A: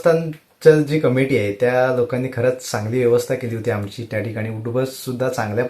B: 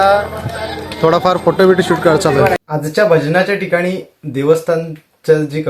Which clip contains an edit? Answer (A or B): B